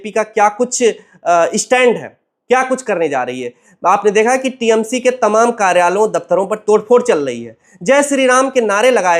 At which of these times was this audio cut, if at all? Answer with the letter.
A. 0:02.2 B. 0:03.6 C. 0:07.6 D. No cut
D